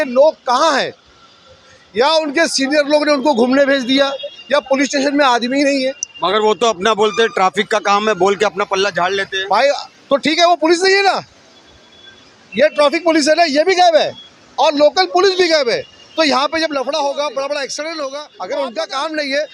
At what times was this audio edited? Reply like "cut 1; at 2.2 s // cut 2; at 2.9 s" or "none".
cut 1; at 18.3 s